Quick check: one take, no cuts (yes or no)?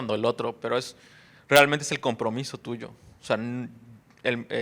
yes